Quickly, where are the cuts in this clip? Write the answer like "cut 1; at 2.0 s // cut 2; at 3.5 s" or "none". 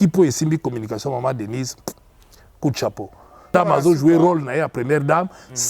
cut 1; at 3.5 s